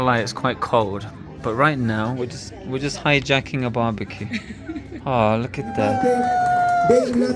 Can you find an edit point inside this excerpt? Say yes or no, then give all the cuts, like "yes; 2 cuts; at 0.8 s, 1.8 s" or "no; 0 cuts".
yes; 1 cut; at 5.9 s